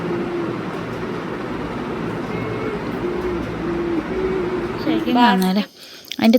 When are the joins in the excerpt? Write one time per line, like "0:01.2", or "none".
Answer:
0:05.2

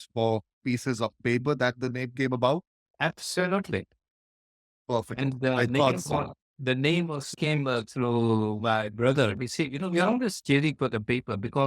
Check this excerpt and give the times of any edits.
0:07.3

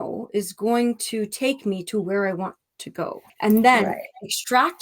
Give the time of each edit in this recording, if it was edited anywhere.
0:03.2

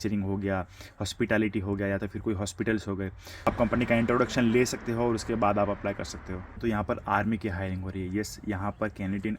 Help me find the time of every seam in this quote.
0:03.5
0:06.5

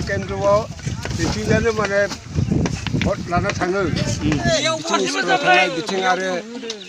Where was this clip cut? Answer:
0:04.5

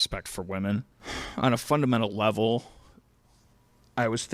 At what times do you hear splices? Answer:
none

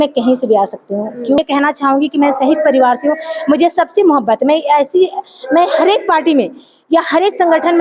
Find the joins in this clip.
0:01.4

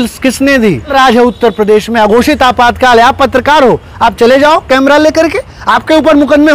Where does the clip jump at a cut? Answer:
0:00.9

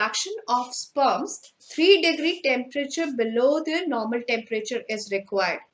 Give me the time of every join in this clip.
none

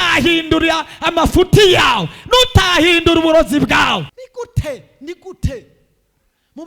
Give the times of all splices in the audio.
0:04.2

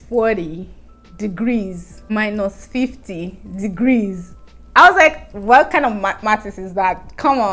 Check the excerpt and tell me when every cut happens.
0:01.9

